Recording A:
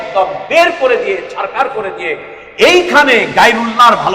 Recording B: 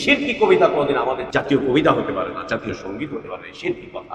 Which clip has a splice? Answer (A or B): B